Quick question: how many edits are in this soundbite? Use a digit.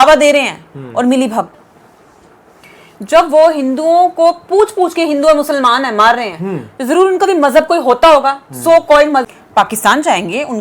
2